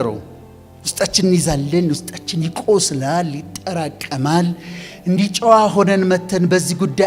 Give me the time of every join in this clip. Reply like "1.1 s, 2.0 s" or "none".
none